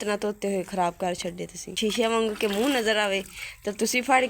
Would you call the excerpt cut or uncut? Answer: cut